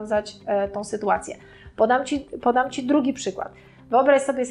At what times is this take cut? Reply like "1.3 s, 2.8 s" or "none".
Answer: none

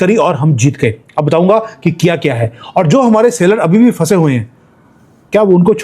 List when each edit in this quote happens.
none

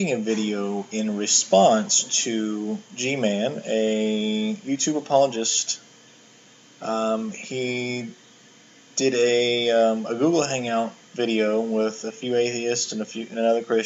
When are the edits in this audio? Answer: none

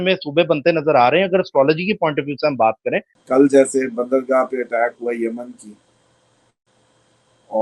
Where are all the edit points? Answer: 3.1 s

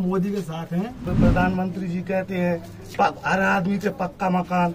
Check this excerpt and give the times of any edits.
1.0 s

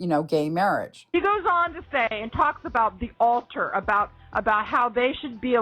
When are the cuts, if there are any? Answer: 1.1 s

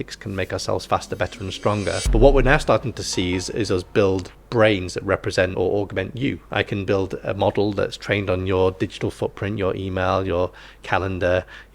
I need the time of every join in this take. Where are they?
2.0 s, 4.4 s, 5.5 s

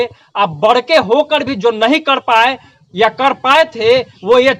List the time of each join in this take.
none

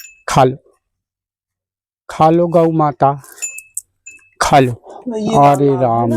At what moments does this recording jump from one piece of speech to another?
5.0 s

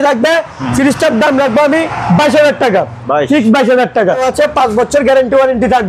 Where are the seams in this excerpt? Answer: 4.2 s

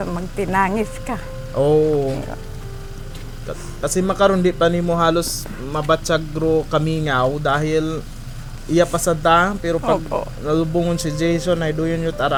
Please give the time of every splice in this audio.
none

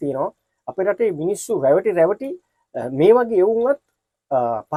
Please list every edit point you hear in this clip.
none

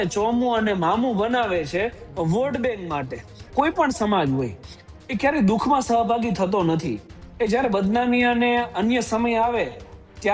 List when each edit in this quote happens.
3.4 s

